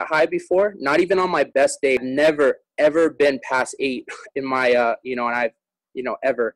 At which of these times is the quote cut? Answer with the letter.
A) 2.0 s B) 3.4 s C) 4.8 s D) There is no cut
A